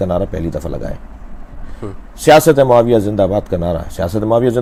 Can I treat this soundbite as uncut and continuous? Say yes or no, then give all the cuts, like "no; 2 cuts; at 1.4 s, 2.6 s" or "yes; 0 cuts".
yes; 0 cuts